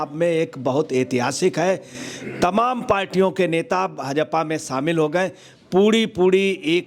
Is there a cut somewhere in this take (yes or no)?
no